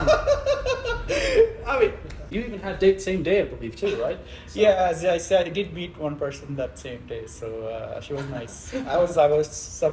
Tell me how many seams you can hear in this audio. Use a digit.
1